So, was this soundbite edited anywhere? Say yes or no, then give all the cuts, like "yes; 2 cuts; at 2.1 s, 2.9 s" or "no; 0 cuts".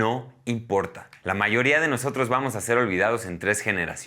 yes; 1 cut; at 1.0 s